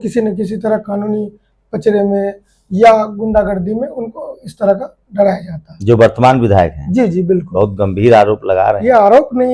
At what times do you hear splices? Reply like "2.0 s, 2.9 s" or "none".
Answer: none